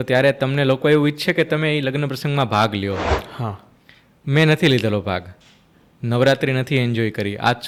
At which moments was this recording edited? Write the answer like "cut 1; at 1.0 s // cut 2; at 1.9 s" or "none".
none